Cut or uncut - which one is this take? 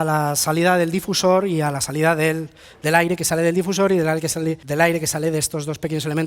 cut